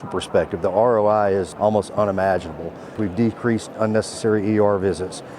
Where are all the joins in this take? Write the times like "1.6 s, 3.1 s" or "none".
1.5 s, 2.9 s